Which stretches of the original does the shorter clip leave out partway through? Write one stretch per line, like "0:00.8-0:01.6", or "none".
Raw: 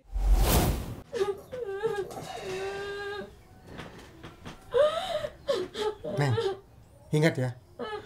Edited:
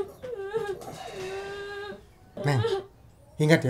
0:03.7-0:06.1